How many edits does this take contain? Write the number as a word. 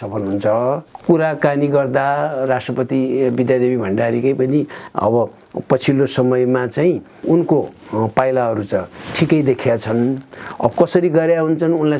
two